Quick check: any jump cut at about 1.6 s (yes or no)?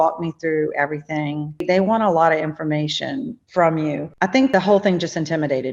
yes